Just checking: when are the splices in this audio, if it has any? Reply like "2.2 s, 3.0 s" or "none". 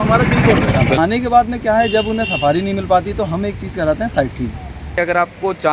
1.0 s, 4.9 s